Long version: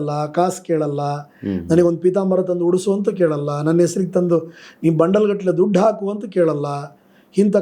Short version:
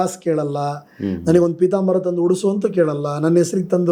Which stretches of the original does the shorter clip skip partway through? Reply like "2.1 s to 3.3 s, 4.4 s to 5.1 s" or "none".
none